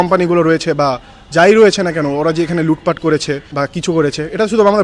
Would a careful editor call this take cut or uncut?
cut